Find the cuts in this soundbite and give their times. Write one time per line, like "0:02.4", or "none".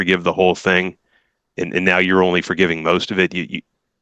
none